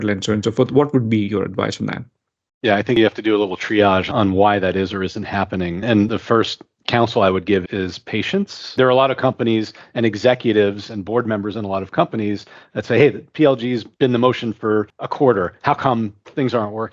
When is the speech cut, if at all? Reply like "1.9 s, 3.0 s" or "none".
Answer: 6.1 s, 8.8 s, 13.9 s, 15.0 s

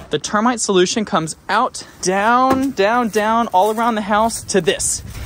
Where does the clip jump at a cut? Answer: 1.9 s

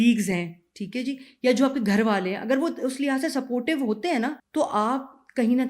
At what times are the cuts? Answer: 4.4 s

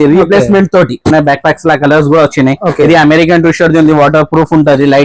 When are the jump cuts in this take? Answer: 1.1 s

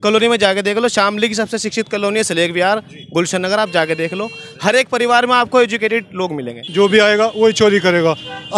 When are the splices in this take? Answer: 6.6 s

